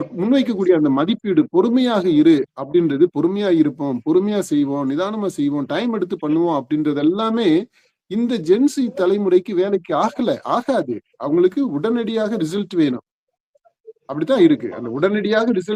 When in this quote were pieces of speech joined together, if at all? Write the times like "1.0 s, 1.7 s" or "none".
none